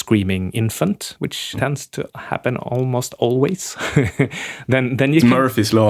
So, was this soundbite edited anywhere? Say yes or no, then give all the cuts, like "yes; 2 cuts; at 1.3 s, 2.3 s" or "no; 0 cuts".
yes; 1 cut; at 1.5 s